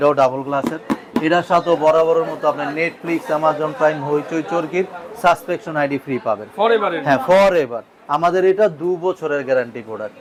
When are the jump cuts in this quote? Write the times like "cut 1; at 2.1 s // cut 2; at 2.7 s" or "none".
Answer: none